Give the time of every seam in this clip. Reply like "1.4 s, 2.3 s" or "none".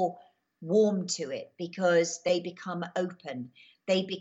2.3 s

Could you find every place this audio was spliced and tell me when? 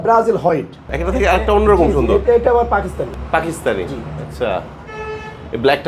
0.9 s

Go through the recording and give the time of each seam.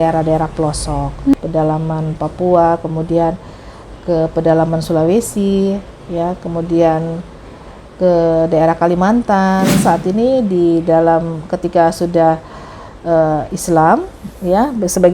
1.3 s, 9.8 s

